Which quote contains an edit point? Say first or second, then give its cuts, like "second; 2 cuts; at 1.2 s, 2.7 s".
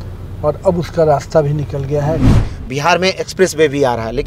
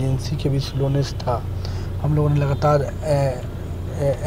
first; 1 cut; at 2.3 s